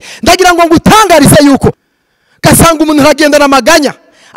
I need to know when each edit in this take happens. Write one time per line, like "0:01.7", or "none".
0:01.8